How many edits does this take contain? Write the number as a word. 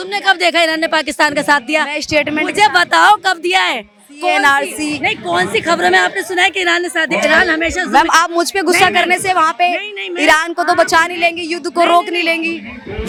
zero